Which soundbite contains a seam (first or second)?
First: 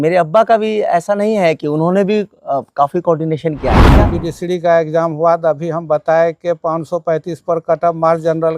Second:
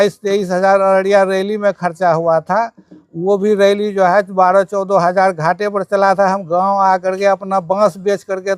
first